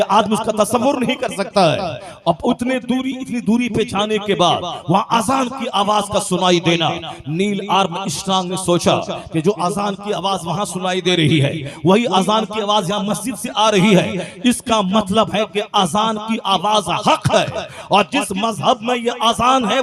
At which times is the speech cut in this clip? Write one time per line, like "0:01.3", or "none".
none